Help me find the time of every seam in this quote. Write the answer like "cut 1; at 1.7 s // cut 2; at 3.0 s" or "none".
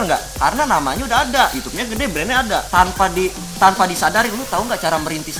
cut 1; at 2.7 s